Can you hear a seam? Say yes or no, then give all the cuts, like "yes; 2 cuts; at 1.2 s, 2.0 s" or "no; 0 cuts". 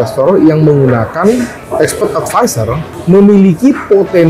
no; 0 cuts